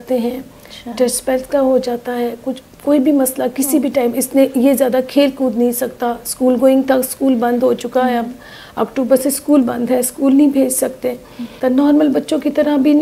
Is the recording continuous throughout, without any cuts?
no; 1 cut; at 11.5 s

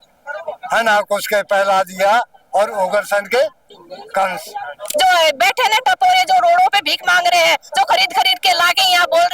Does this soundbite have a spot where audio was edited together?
yes; 1 cut; at 4.8 s

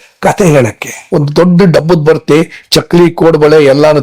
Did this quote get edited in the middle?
yes; 1 cut; at 0.9 s

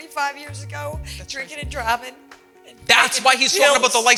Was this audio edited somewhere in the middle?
no; 0 cuts

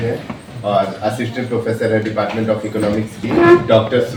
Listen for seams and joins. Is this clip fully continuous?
yes; 0 cuts

